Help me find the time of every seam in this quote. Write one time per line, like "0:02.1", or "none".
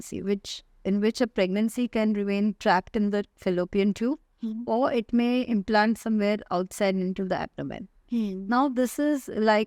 none